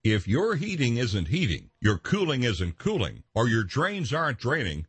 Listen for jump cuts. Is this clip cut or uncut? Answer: uncut